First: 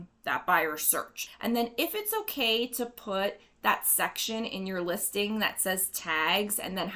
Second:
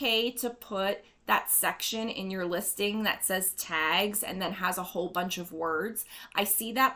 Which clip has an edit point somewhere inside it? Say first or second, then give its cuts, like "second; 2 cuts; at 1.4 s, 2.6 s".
first; 1 cut; at 1.2 s